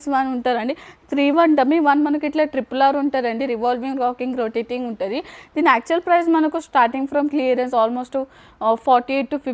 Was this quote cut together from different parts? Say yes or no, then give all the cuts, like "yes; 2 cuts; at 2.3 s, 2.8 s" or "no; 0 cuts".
no; 0 cuts